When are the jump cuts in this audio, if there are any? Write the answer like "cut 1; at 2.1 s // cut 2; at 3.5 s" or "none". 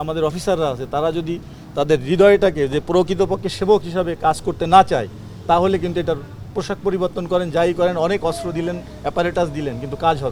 none